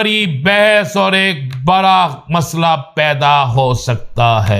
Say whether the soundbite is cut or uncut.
uncut